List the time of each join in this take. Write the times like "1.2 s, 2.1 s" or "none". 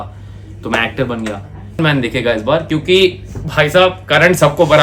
1.8 s